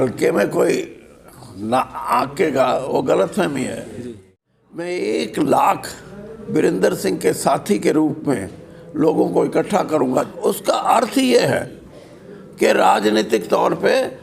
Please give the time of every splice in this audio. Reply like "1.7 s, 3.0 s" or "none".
4.3 s, 10.3 s